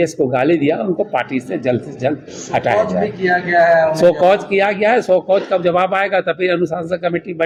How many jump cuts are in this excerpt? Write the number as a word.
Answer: zero